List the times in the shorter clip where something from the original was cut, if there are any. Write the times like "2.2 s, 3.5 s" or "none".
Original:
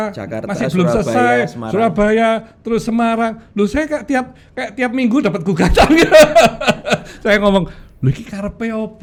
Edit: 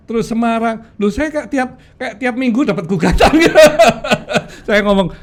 none